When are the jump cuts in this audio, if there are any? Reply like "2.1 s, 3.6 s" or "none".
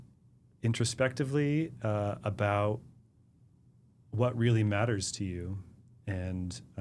none